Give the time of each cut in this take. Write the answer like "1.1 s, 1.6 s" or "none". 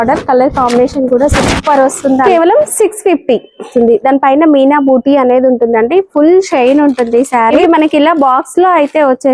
2.2 s, 3.7 s, 7.6 s